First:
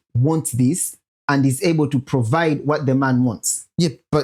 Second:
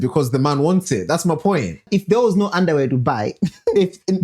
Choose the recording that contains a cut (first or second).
second